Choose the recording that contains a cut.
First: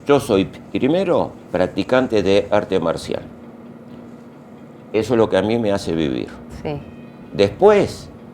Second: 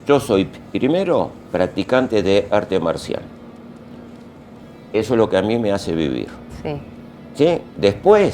first; 1 cut; at 7.2 s

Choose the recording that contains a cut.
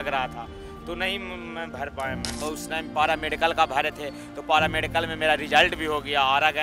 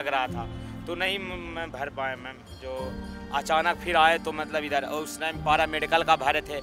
first; 1 cut; at 2.4 s

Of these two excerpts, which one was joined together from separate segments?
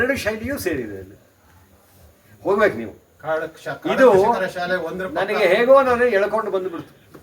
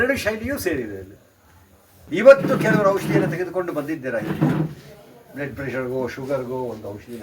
second; 1 cut; at 2.0 s

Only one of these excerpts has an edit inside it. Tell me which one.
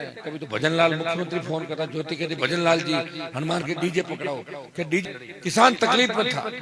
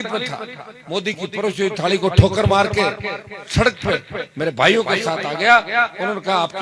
first; 1 cut; at 5.0 s

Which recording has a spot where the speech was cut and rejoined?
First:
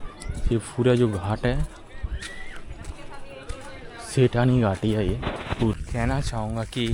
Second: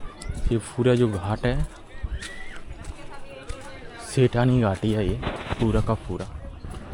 first; 1 cut; at 5.7 s

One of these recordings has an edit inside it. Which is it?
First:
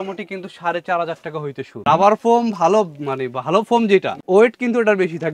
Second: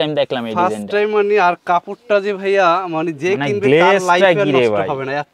first; 2 cuts; at 1.8 s, 4.2 s

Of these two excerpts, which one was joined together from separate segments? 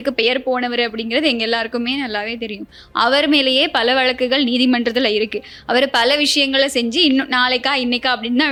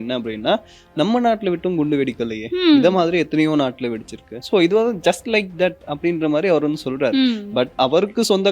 second; 2 cuts; at 4.4 s, 7.7 s

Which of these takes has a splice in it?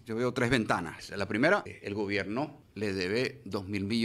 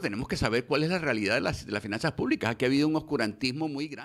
first; 3 cuts; at 1.0 s, 1.7 s, 2.6 s

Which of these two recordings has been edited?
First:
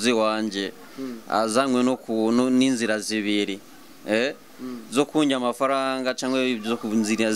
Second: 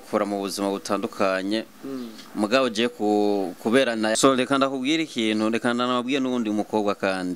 second; 1 cut; at 4.2 s

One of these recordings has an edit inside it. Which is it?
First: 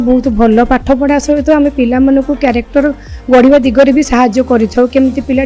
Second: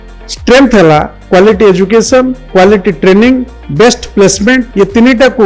second; 4 cuts; at 1.2 s, 2.4 s, 3.6 s, 4.7 s

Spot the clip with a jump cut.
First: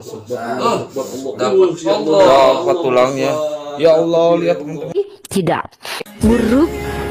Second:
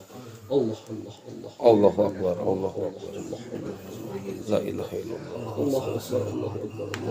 first; 1 cut; at 4.8 s

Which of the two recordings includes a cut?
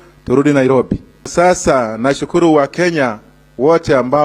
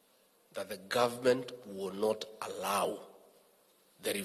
first; 1 cut; at 1.3 s

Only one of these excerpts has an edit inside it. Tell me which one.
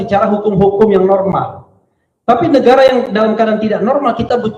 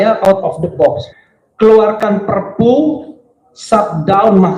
second; 1 cut; at 1.0 s

